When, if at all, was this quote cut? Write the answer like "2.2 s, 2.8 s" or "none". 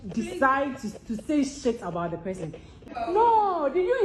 2.7 s